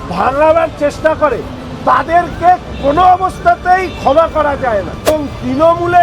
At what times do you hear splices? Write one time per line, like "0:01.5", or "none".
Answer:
0:05.1